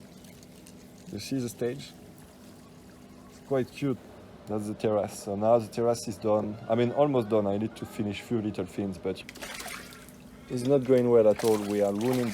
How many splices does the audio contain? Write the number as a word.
two